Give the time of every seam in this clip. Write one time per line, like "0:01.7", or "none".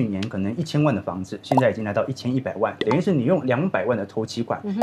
0:02.8

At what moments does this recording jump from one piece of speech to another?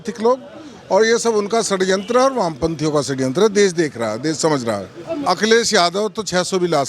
0:05.2

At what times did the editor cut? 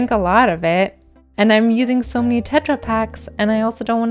0:01.1

